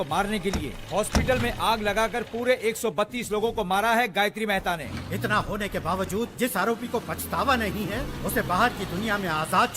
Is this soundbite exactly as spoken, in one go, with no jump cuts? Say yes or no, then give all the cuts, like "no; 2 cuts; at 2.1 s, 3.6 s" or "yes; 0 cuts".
no; 1 cut; at 4.8 s